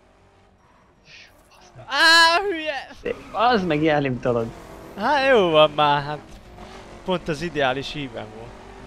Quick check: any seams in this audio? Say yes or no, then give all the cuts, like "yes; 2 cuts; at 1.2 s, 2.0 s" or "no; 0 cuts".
yes; 1 cut; at 2.4 s